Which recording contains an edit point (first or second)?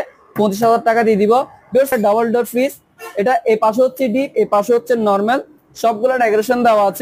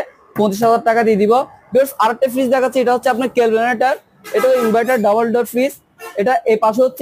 first